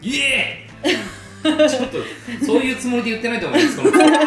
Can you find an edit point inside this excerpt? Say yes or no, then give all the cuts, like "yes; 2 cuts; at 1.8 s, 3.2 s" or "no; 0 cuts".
no; 0 cuts